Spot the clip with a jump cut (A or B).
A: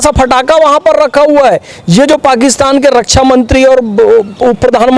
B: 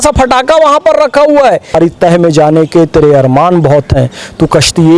B